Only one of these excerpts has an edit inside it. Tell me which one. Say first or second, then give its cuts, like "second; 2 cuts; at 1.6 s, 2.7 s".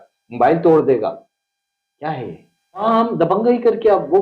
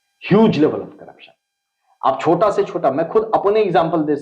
first; 1 cut; at 2.8 s